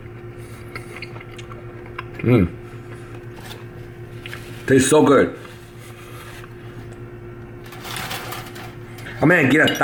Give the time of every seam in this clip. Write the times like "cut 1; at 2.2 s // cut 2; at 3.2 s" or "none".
none

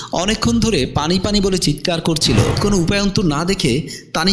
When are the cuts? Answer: cut 1; at 2.6 s

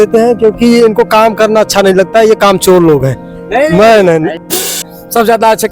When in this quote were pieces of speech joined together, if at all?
cut 1; at 4.8 s

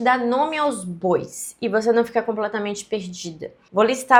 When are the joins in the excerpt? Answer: none

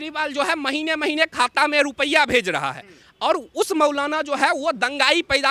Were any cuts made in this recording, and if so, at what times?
none

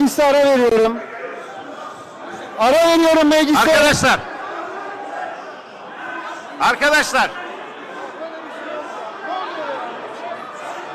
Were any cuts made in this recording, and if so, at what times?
none

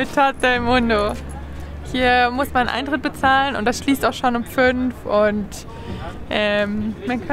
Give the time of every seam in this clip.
none

